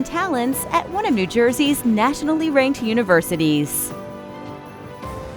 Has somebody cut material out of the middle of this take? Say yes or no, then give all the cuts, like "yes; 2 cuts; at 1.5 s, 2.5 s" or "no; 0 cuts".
yes; 1 cut; at 3.7 s